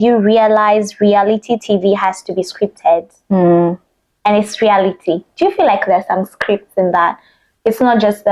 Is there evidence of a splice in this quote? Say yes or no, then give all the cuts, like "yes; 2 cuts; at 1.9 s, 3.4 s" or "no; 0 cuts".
no; 0 cuts